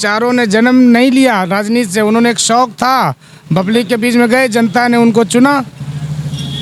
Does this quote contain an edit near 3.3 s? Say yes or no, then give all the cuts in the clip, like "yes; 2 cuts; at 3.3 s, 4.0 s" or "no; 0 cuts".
no; 0 cuts